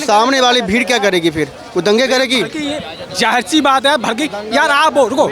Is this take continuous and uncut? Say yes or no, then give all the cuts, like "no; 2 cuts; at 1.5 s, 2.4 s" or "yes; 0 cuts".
yes; 0 cuts